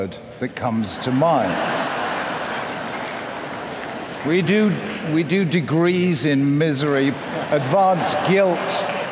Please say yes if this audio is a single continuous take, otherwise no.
no